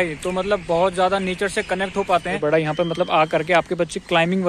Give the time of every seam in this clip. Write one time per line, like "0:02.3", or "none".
0:02.4

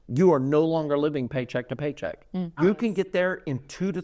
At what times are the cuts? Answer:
0:02.6

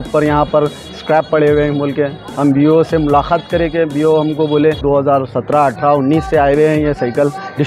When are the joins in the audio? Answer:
0:04.8

